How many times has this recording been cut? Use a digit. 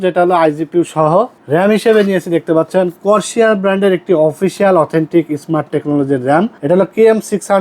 2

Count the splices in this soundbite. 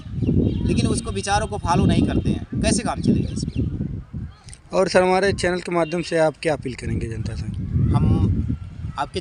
0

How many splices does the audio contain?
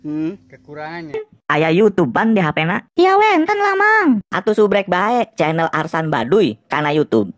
1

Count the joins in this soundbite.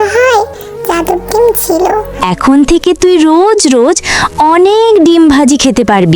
1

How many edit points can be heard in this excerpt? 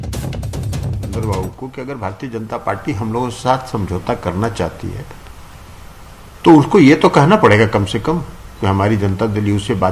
1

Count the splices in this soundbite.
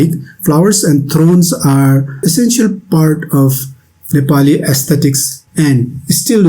1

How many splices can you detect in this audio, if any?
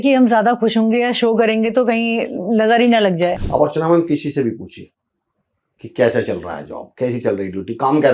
1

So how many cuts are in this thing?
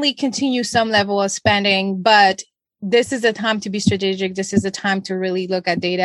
0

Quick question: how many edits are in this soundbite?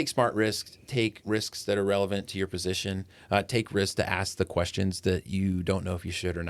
1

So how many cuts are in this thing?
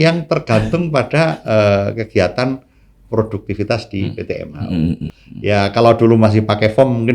1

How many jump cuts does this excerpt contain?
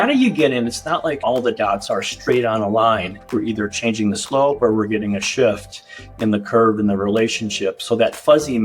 2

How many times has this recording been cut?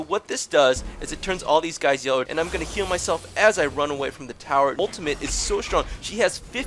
2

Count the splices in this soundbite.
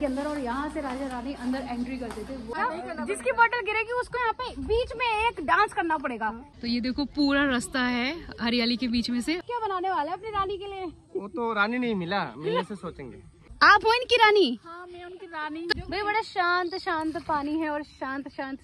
5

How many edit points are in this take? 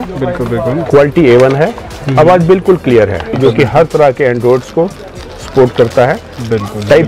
1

